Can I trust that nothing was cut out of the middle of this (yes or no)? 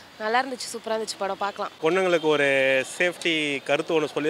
no